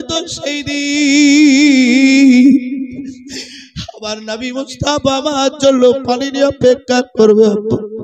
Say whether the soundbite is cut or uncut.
uncut